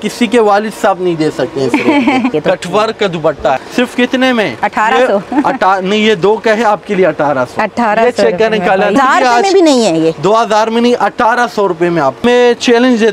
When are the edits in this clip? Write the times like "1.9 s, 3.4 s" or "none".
2.3 s, 3.6 s, 9.0 s, 12.2 s